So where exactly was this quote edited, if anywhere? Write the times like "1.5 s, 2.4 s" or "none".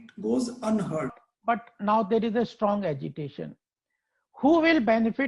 1.2 s